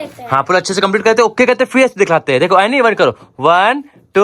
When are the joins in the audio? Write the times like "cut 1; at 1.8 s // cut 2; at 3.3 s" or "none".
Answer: none